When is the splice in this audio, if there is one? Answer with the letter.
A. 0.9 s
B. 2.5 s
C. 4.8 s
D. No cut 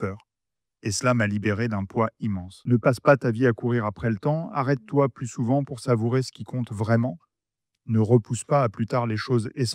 B